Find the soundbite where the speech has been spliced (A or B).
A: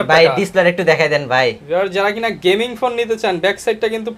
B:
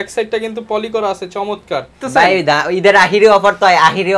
B